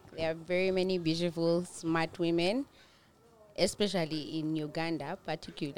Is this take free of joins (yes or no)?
yes